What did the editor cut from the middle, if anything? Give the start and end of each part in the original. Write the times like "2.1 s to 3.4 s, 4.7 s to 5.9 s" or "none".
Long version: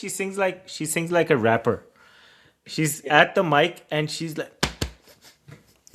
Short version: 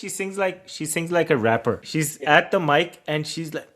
1.8 s to 2.7 s